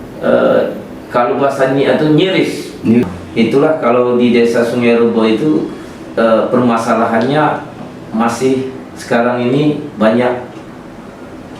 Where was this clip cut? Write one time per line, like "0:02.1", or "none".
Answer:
0:03.0